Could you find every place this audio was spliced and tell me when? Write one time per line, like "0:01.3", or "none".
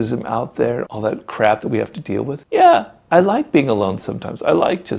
none